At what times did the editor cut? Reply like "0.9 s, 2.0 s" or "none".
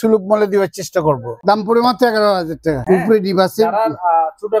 1.3 s, 2.8 s